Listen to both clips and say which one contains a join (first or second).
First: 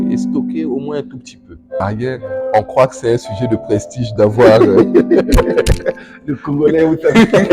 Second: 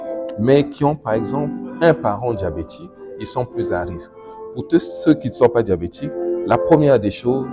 first